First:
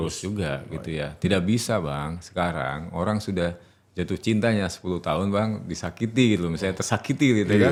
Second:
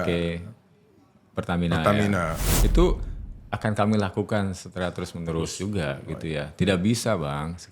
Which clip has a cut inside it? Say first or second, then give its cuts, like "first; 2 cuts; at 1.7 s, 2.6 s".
second; 1 cut; at 2.5 s